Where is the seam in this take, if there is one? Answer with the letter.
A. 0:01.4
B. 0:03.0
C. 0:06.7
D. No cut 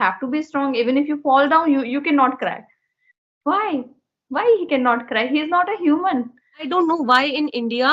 C